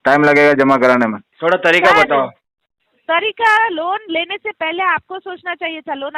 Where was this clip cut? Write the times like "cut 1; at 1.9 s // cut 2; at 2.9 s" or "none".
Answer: cut 1; at 1.3 s